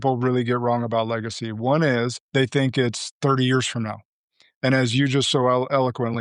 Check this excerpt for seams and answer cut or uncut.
cut